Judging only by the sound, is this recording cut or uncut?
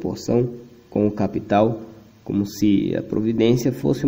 uncut